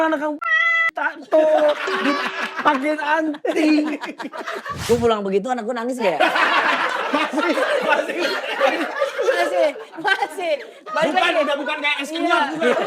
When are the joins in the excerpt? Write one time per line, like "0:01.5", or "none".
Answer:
0:04.8